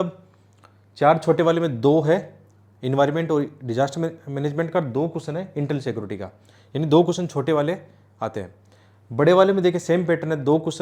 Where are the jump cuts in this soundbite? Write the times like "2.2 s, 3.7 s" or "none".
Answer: none